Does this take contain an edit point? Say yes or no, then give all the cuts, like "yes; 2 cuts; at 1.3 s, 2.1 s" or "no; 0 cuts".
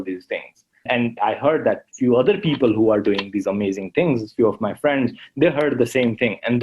yes; 1 cut; at 1.0 s